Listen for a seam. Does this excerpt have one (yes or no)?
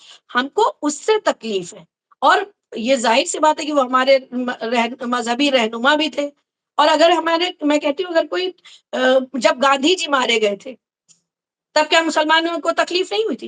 no